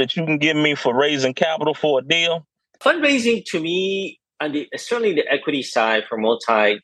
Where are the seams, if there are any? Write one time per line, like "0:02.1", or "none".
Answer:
0:02.7